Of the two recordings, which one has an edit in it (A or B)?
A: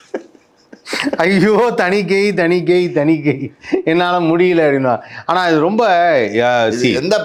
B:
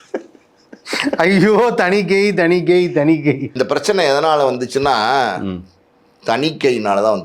B